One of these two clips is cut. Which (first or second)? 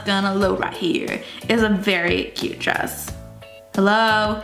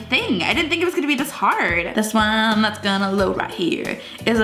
second